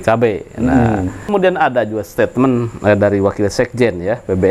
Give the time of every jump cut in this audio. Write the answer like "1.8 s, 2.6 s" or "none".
1.3 s